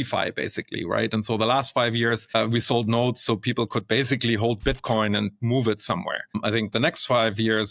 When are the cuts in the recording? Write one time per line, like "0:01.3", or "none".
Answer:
none